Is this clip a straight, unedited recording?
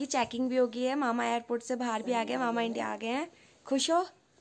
yes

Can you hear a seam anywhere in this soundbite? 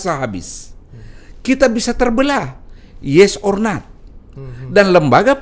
no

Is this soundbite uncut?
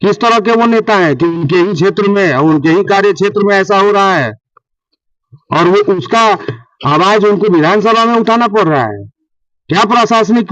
yes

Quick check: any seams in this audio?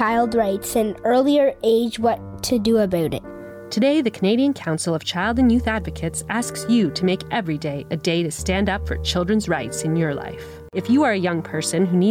yes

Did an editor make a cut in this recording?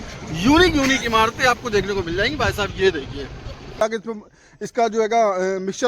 yes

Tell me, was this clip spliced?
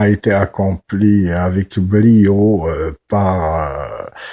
yes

